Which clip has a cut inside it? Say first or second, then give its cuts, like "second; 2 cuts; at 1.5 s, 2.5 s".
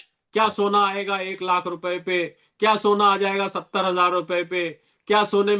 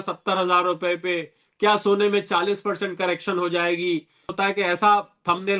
second; 1 cut; at 4.3 s